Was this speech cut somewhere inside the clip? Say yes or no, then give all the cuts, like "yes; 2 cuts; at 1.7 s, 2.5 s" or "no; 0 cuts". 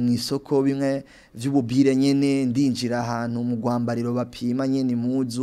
no; 0 cuts